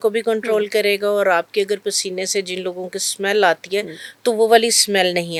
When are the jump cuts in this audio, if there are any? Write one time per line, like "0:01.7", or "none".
none